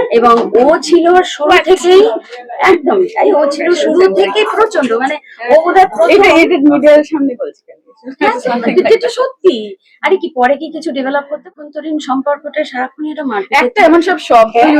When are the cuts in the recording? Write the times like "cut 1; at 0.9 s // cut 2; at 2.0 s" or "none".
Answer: cut 1; at 11.5 s